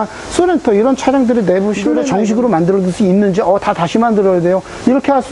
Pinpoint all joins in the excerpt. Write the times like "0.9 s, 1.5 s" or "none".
2.0 s

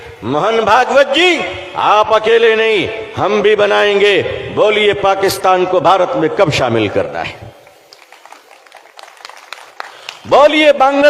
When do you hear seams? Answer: none

